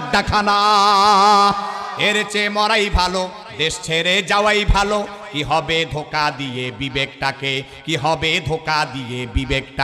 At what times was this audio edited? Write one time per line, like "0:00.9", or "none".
none